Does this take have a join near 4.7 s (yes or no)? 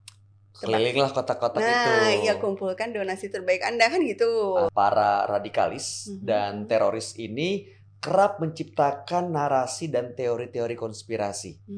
yes